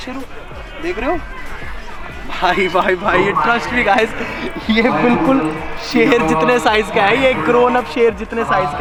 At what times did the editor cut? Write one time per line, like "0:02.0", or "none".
none